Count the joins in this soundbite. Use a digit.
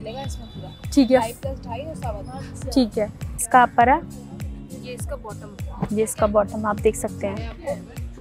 1